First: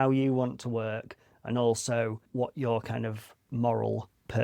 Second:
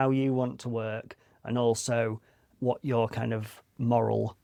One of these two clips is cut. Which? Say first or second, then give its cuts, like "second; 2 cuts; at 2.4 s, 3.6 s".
first; 1 cut; at 2.2 s